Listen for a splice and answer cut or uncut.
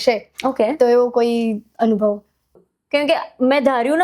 cut